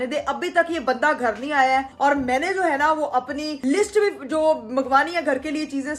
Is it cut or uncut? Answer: uncut